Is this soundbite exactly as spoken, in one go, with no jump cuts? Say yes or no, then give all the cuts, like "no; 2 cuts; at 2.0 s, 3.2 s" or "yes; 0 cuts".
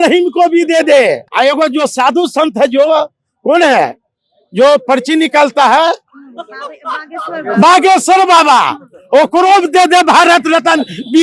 no; 1 cut; at 1.2 s